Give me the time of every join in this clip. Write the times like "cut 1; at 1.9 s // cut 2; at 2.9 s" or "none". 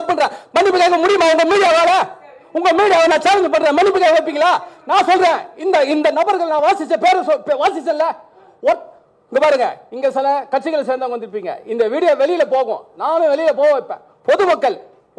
none